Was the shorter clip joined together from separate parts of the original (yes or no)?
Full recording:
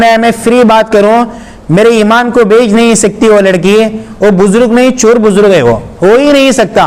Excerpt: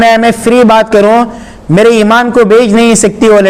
no